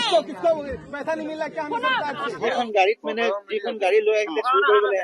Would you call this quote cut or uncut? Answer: cut